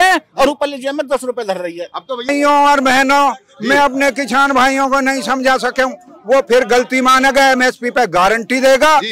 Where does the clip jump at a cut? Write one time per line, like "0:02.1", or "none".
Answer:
0:02.3